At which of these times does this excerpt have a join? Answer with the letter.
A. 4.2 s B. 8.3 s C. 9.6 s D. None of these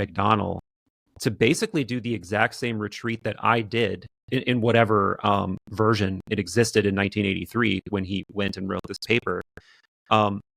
D